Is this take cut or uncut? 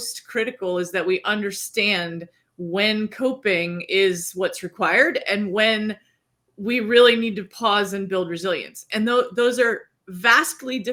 uncut